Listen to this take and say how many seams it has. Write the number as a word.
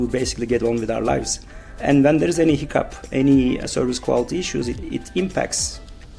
one